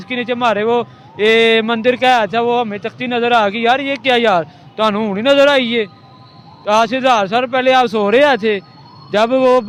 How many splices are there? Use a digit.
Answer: 0